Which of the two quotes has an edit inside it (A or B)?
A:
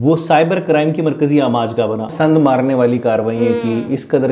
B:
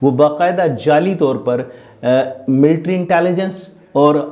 A